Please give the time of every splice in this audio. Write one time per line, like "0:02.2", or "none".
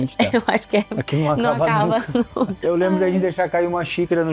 0:02.6